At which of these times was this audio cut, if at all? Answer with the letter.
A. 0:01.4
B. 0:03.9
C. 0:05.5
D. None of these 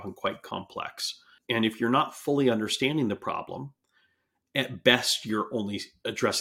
A